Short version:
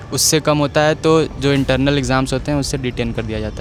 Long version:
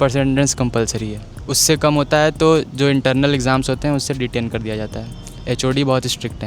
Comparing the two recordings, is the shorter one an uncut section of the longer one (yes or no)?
yes